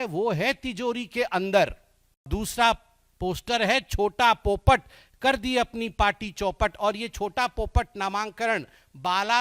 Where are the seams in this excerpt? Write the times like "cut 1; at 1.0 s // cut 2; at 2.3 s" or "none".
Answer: cut 1; at 2.3 s